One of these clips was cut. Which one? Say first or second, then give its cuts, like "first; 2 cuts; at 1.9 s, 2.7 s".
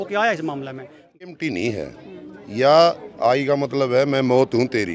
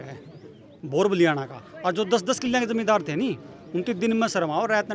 first; 1 cut; at 1.3 s